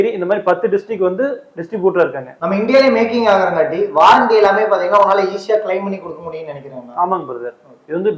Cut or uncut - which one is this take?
uncut